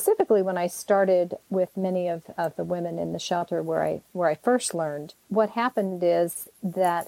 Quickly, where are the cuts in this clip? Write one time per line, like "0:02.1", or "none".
none

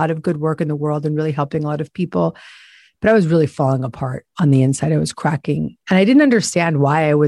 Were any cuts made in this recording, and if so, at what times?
0:05.7

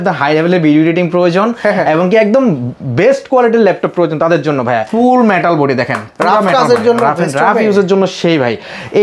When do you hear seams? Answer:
0:04.9

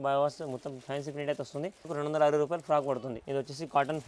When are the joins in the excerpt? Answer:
0:01.9
0:03.1

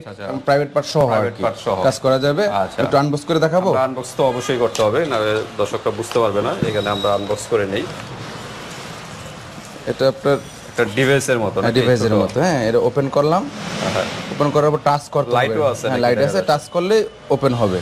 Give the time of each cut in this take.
none

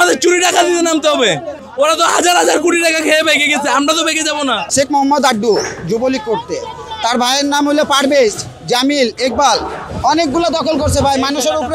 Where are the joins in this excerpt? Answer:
0:01.6
0:04.6
0:09.8

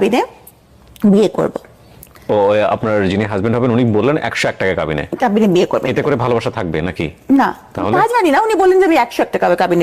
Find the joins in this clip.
none

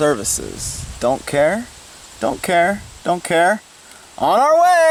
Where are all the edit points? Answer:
none

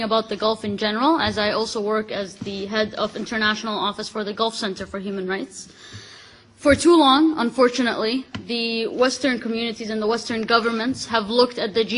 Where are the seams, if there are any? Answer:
0:03.5

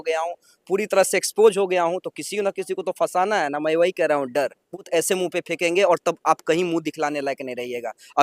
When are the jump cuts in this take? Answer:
0:04.9

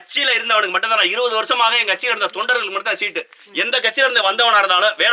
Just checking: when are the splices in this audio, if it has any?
none

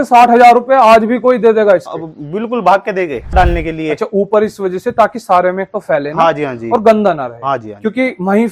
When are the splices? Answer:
0:03.3

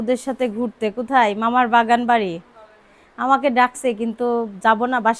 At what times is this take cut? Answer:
none

